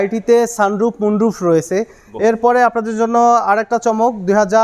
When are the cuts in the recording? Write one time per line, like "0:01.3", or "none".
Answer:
0:02.1